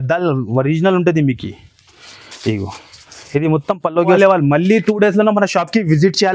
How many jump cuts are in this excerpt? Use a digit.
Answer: 1